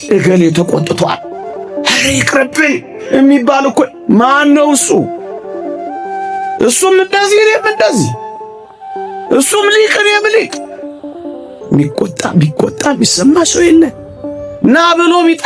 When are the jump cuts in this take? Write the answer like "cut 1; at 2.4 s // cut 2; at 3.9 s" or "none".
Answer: cut 1; at 5.1 s // cut 2; at 6.6 s // cut 3; at 11.0 s